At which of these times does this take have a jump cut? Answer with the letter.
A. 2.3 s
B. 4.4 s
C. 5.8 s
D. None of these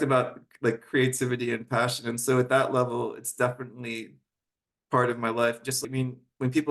C